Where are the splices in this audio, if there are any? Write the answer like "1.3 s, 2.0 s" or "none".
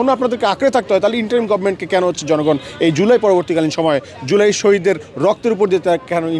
none